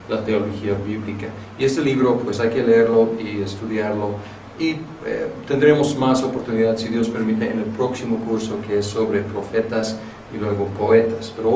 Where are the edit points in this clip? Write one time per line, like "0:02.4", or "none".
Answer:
none

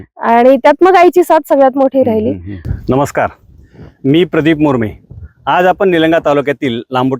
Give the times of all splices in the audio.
0:02.8

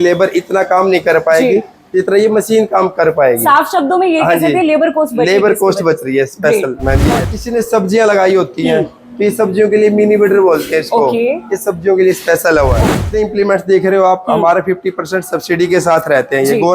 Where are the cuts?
0:07.2
0:12.9

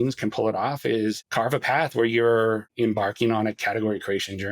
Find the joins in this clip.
0:01.2
0:02.7

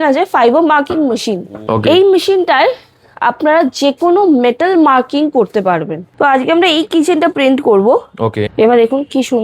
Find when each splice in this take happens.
0:01.5
0:06.0
0:08.4

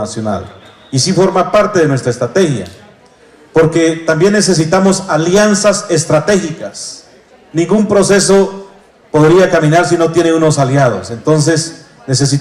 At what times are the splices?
none

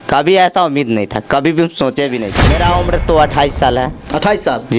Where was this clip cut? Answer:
0:02.4

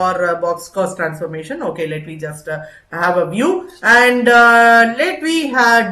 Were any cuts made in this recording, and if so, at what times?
none

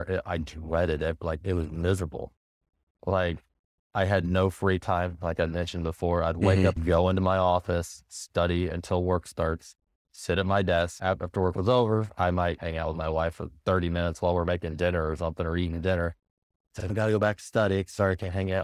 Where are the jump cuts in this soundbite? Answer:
none

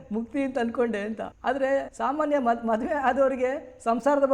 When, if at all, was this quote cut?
0:01.8

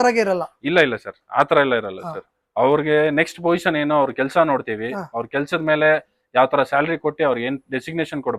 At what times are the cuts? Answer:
none

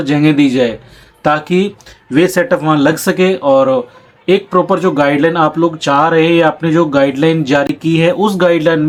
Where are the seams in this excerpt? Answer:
none

